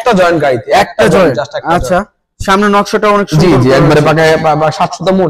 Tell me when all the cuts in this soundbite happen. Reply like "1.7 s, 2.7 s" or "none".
none